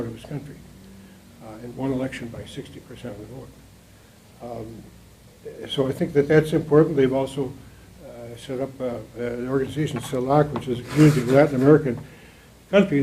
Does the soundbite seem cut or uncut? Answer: cut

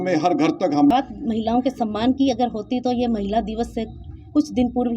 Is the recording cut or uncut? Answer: cut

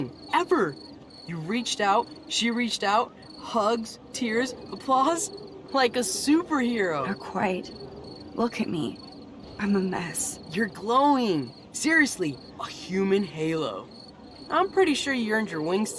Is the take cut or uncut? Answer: uncut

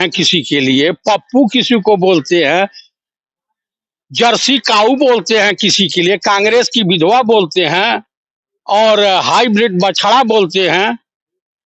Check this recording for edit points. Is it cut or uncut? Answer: uncut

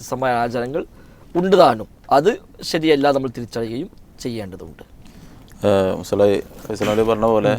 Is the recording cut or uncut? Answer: uncut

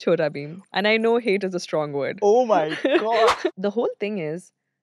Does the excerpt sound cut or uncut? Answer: cut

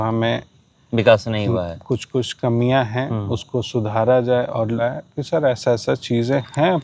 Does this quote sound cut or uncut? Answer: cut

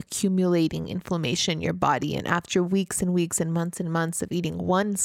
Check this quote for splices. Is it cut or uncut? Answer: uncut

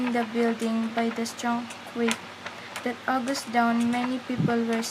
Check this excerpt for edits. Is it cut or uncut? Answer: cut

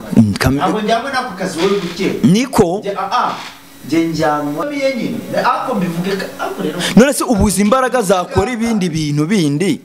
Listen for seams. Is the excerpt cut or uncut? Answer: cut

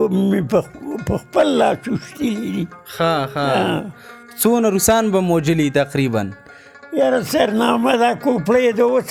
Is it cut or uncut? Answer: uncut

